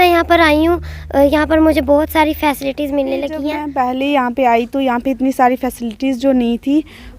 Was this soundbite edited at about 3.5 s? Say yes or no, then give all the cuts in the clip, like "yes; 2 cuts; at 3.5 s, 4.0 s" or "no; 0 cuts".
yes; 1 cut; at 3.5 s